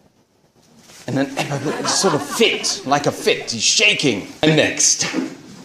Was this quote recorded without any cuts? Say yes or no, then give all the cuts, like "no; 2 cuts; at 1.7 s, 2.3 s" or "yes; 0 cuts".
no; 1 cut; at 4.4 s